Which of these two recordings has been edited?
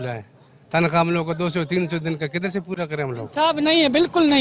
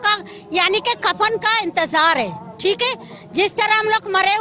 first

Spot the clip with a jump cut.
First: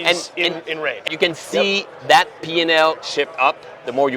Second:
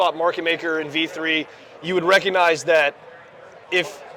first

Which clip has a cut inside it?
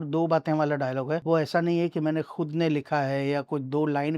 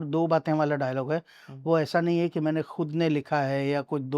first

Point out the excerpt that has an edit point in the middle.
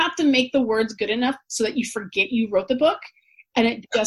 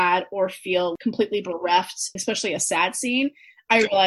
second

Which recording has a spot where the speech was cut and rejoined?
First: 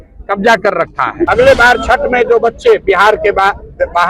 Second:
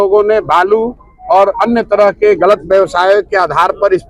first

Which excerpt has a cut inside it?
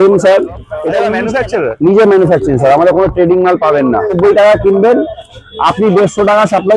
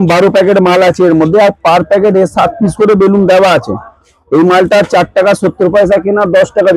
first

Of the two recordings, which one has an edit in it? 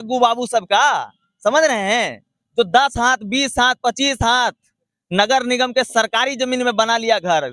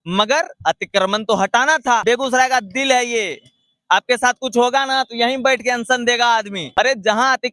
second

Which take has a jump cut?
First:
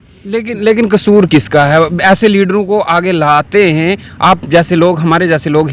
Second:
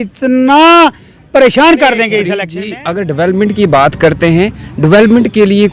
second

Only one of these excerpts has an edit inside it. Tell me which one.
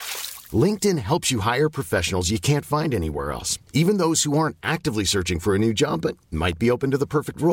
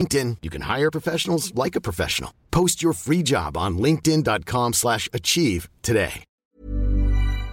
second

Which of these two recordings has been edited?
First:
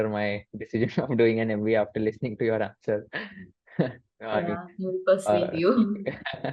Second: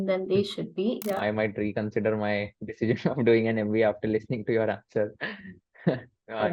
second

